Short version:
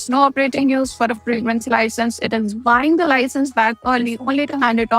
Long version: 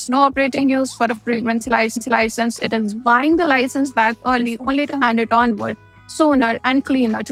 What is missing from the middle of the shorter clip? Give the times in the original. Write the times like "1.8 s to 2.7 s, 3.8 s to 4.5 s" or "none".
1.8 s to 2.2 s